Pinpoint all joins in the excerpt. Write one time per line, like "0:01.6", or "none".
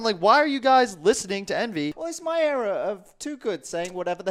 0:02.0